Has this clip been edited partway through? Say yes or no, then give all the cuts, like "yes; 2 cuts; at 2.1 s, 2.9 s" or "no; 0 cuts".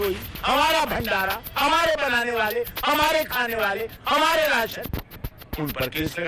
no; 0 cuts